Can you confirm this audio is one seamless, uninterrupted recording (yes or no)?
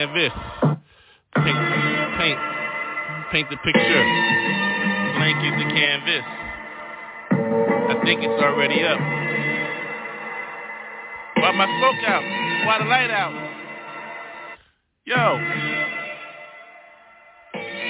yes